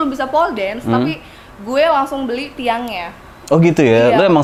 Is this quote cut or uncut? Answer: uncut